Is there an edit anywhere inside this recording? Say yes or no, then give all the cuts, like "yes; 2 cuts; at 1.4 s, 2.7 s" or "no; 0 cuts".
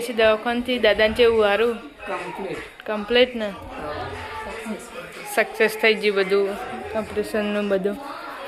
no; 0 cuts